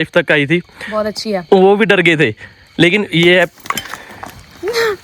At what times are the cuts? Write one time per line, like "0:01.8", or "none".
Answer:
none